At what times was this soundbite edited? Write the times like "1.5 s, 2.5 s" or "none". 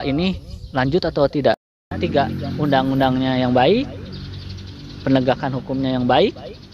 2.0 s